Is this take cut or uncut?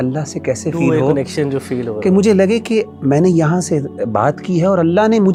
uncut